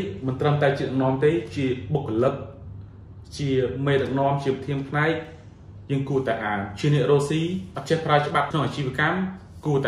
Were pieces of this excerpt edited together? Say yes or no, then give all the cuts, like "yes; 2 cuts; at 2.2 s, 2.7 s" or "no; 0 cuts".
yes; 2 cuts; at 7.7 s, 8.5 s